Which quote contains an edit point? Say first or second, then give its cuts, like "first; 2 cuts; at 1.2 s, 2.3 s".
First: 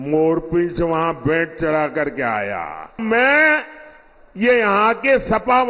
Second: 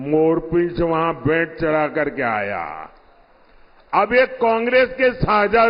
first; 1 cut; at 3.0 s